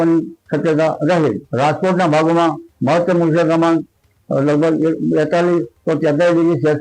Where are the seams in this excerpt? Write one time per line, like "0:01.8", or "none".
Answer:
0:01.4